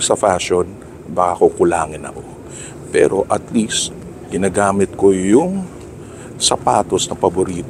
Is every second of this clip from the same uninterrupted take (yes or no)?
yes